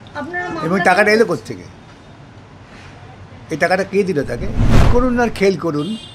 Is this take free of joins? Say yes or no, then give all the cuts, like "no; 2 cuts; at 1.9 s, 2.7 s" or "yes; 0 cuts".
no; 1 cut; at 4.9 s